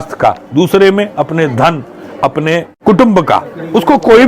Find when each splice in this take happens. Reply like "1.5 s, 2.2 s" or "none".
none